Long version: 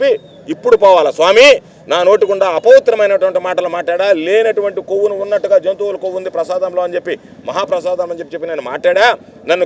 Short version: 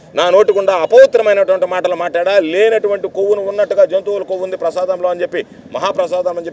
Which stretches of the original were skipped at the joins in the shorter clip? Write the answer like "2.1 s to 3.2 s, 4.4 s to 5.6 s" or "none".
none